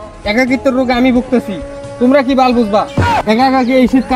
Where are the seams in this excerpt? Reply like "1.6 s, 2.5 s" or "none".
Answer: 3.2 s